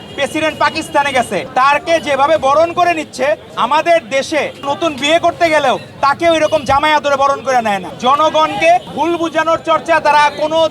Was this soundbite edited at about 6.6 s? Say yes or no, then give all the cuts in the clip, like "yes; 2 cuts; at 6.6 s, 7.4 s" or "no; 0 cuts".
no; 5 cuts; at 1.5 s, 3.5 s, 4.6 s, 7.9 s, 8.9 s